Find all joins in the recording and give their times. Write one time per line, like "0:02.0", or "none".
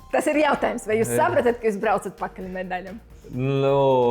none